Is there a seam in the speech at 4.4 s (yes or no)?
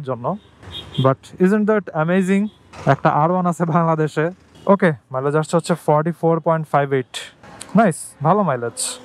yes